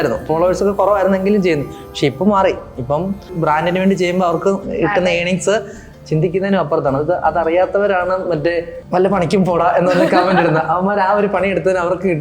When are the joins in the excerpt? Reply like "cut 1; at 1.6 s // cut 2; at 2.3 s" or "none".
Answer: cut 1; at 3.3 s // cut 2; at 8.8 s